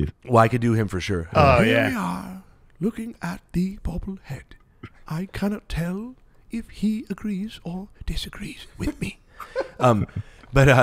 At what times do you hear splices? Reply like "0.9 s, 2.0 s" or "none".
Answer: none